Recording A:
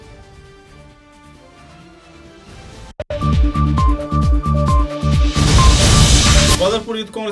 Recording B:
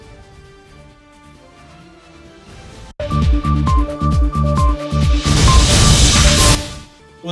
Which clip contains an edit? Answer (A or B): A